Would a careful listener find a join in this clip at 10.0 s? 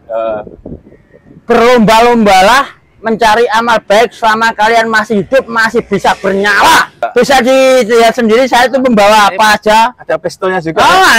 no; 1 cut; at 7.0 s

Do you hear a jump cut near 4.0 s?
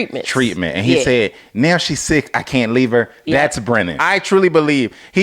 yes; 1 cut; at 4.0 s

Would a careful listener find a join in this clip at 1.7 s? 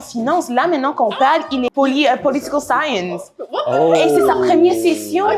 yes; 1 cut; at 1.7 s

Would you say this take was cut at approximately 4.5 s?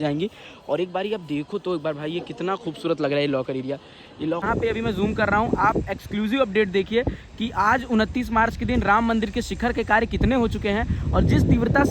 yes; 1 cut; at 4.5 s

